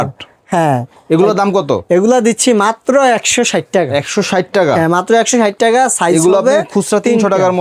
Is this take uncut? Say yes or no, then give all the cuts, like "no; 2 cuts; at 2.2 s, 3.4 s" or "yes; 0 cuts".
yes; 0 cuts